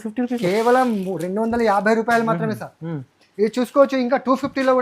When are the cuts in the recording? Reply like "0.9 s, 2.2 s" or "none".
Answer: none